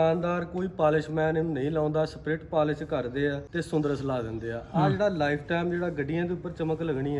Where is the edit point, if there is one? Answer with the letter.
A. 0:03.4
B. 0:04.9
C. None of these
A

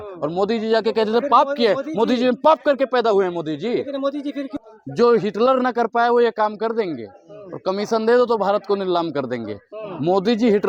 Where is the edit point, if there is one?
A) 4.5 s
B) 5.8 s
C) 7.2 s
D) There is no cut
A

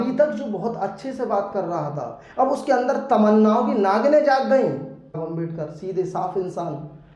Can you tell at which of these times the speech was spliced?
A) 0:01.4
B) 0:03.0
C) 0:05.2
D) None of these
C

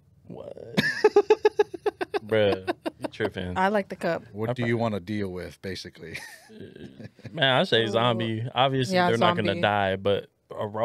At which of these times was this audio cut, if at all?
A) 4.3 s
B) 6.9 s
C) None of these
A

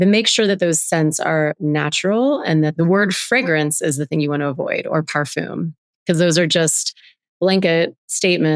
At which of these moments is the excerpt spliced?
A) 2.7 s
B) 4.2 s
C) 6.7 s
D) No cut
A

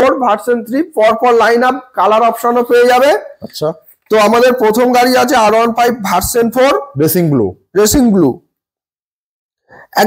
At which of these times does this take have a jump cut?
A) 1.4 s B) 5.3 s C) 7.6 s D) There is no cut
D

